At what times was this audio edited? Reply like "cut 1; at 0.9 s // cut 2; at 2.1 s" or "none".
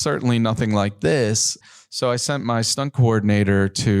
cut 1; at 1.6 s // cut 2; at 2.7 s